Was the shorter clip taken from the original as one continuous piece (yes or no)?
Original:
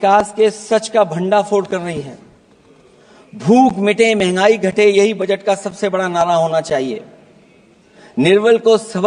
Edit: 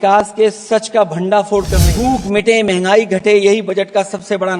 no